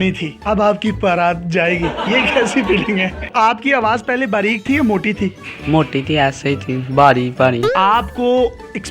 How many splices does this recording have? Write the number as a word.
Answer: two